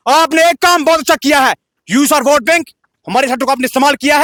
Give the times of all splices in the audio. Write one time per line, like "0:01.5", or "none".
none